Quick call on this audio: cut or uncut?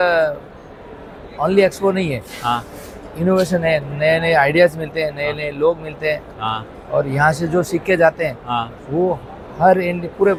uncut